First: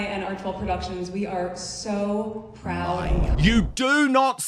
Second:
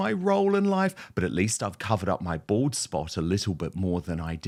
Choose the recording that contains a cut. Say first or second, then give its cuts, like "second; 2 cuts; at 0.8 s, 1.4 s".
first; 1 cut; at 3.2 s